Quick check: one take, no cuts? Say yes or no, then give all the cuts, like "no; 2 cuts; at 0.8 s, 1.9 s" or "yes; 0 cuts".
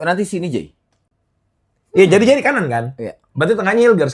yes; 0 cuts